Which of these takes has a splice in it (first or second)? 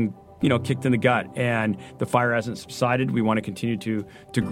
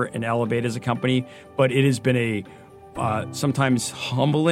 first